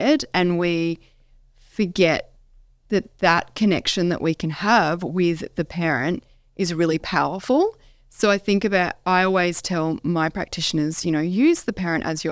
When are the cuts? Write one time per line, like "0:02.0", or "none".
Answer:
none